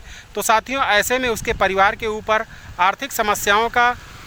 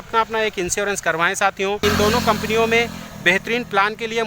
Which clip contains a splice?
second; 1 cut; at 1.8 s

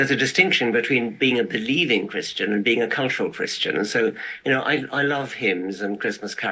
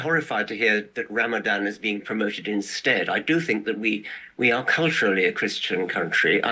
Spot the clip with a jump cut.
first; 1 cut; at 1.8 s

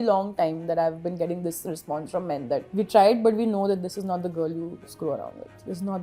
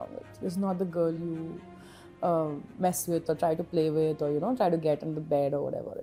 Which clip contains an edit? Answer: first; 1 cut; at 2.7 s

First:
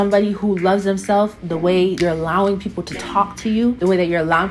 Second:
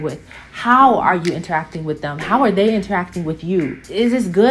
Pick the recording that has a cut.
first; 2 cuts; at 2.0 s, 3.8 s

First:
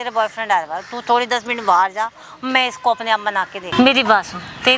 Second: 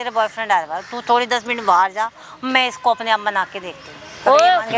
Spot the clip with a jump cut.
first; 1 cut; at 3.6 s

